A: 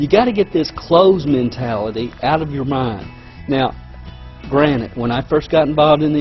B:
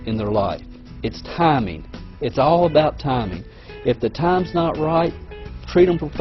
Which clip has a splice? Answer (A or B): B